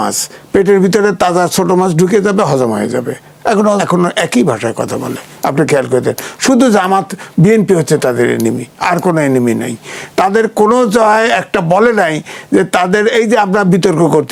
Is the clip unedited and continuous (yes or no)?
yes